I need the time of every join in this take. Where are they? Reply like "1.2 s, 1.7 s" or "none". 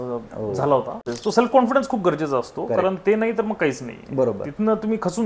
1.1 s